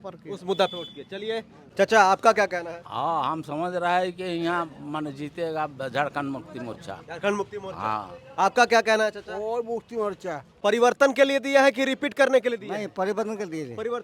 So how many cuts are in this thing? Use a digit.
2